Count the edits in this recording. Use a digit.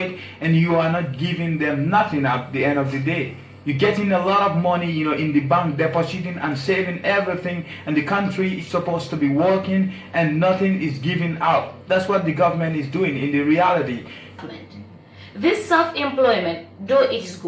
1